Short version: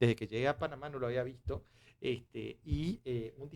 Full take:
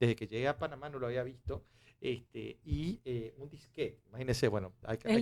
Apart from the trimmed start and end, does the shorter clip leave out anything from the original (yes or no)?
no